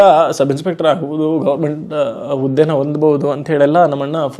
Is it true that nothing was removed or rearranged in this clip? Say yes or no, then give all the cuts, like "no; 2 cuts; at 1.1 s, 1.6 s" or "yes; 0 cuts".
yes; 0 cuts